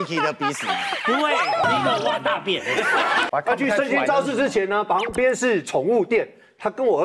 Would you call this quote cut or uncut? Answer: cut